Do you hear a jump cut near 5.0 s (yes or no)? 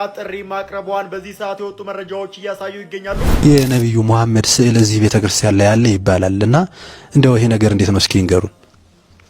no